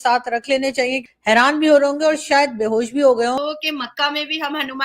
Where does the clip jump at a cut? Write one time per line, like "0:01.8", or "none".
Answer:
0:01.0
0:03.4